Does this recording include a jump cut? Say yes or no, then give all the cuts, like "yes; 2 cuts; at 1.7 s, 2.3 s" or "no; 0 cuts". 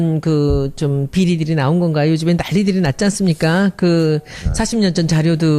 no; 0 cuts